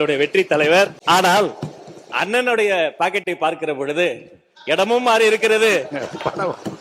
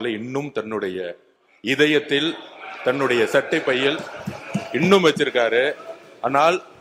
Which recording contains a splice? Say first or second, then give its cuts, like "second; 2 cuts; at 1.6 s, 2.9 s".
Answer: first; 1 cut; at 1.0 s